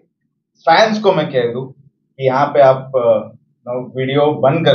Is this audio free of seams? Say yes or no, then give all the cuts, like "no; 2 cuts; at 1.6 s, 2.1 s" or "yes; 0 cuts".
yes; 0 cuts